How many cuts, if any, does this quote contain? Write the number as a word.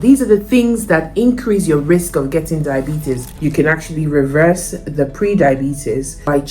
one